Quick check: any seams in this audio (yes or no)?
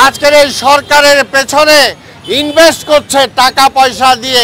no